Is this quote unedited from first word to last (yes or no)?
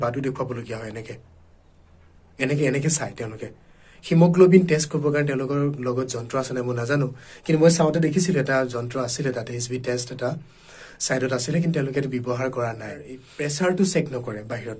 no